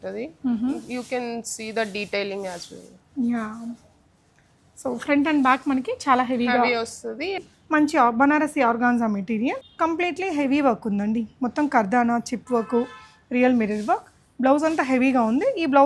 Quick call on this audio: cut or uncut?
cut